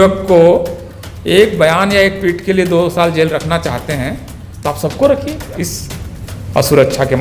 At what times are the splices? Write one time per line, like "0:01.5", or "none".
0:05.5